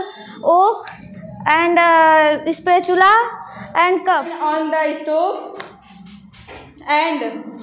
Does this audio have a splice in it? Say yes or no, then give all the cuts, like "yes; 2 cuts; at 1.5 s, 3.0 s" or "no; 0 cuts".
yes; 1 cut; at 4.3 s